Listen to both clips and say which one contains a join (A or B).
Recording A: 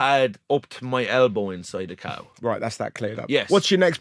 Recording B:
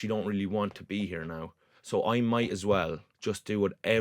B